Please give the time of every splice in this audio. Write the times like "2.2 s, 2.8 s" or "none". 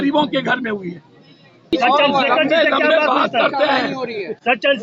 1.7 s